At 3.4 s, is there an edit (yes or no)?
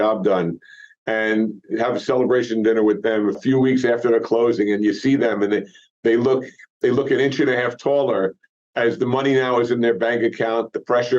yes